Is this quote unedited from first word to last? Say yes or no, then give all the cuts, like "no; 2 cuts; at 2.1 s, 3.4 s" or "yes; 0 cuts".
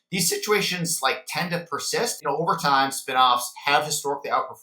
no; 1 cut; at 2.2 s